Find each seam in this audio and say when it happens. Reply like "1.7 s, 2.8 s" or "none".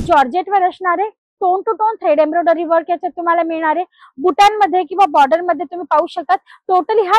none